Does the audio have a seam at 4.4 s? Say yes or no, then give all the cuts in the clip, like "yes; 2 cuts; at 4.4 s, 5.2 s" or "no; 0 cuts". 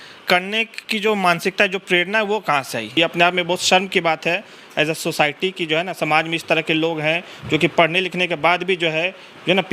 no; 1 cut; at 3.0 s